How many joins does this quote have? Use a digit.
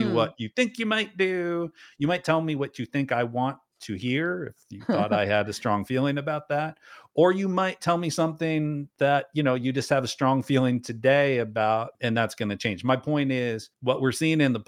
2